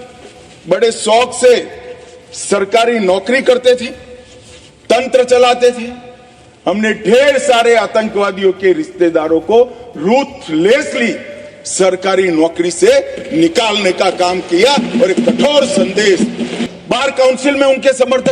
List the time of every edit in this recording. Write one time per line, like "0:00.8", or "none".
0:16.6